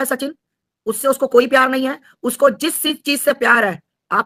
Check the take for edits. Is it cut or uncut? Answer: uncut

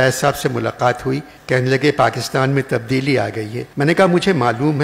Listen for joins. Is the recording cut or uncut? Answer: cut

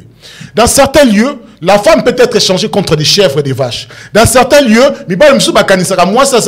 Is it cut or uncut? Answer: uncut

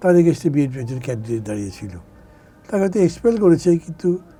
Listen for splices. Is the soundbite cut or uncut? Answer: uncut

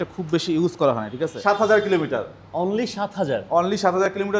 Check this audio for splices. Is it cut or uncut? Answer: cut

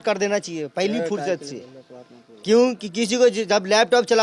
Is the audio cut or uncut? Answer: uncut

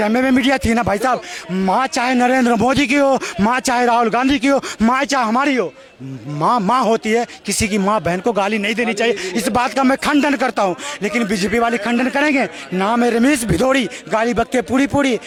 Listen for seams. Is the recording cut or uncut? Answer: uncut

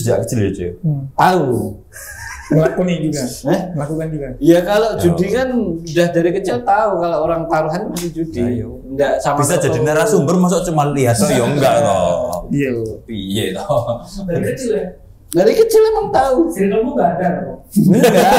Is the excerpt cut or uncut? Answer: uncut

